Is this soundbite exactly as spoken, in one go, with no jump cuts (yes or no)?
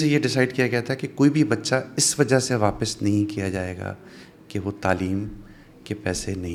yes